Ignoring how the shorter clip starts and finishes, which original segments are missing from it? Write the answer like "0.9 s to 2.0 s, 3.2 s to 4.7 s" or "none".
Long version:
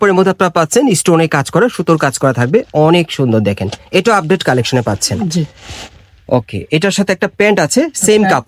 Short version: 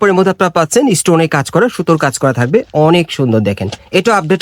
none